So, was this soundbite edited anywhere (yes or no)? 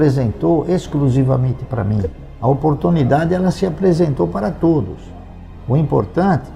no